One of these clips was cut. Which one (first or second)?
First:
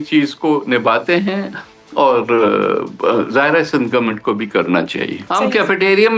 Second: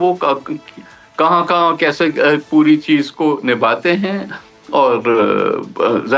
first